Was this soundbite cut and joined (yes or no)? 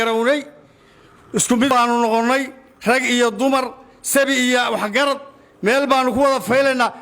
yes